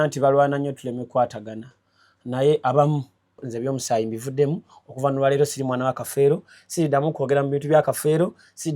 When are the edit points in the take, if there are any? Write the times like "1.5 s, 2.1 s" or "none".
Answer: 3.4 s